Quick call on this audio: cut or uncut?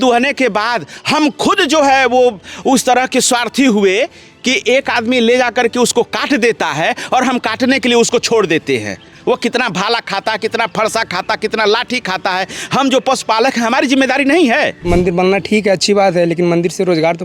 cut